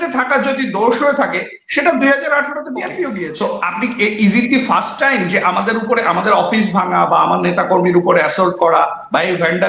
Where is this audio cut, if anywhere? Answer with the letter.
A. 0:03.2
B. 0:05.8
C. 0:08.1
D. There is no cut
A